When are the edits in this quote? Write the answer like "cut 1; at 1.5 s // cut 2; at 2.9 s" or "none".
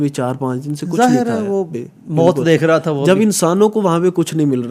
none